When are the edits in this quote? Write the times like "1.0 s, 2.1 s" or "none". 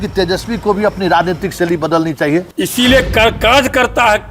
2.5 s